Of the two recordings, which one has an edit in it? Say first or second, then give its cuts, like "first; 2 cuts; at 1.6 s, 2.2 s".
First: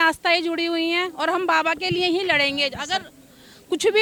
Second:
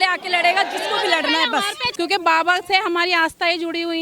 second; 1 cut; at 1.8 s